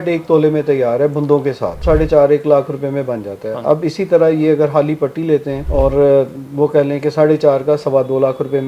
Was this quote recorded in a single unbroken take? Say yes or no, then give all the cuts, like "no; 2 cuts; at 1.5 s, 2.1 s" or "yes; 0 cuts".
no; 2 cuts; at 1.8 s, 5.6 s